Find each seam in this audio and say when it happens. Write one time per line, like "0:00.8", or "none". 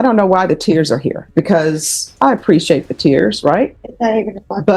0:01.2
0:02.1
0:03.8